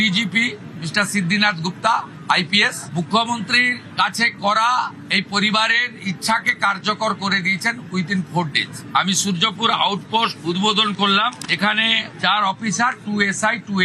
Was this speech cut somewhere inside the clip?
no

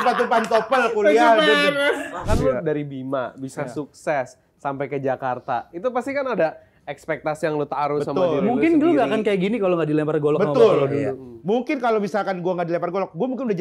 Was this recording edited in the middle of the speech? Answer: yes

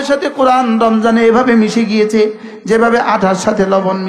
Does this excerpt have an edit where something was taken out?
no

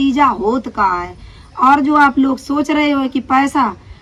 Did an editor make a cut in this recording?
no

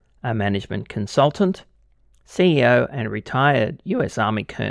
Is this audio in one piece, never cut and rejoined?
yes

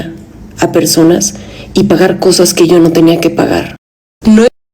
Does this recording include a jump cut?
yes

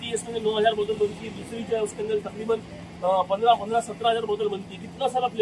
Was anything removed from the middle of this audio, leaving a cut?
no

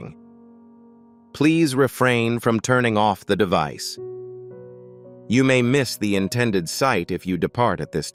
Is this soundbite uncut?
yes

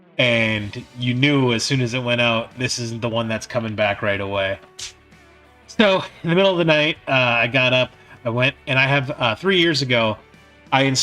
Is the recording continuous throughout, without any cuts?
yes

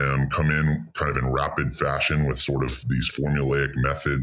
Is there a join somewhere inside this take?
no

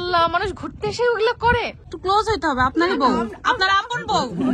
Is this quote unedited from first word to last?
no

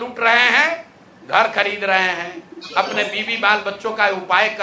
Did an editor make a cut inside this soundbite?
no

